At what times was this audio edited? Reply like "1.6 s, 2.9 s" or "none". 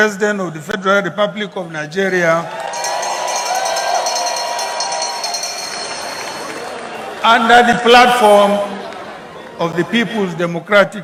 none